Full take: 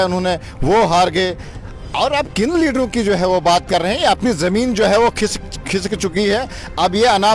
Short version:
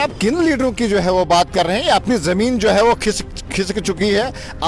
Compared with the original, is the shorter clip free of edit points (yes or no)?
yes